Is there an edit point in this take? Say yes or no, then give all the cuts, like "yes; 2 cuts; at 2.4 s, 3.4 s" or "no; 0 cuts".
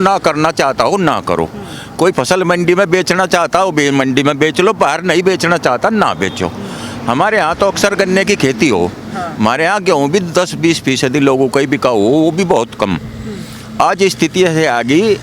no; 0 cuts